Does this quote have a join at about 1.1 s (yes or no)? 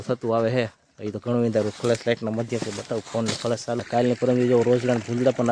no